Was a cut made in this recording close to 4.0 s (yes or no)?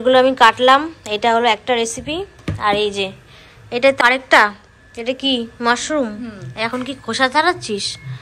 yes